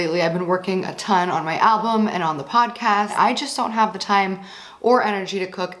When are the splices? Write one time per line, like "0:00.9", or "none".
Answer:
0:03.1